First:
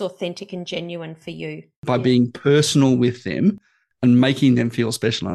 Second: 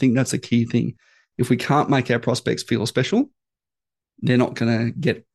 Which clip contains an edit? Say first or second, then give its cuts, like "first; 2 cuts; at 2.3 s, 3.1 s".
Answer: first; 1 cut; at 1.8 s